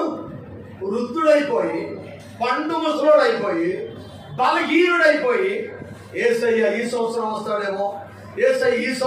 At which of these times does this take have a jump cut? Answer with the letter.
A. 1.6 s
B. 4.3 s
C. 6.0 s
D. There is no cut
D